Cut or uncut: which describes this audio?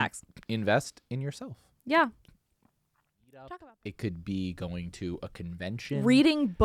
cut